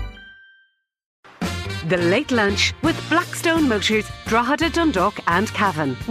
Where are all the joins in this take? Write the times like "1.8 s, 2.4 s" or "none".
1.3 s